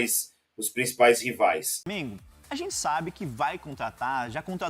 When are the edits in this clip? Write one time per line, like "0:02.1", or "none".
0:02.2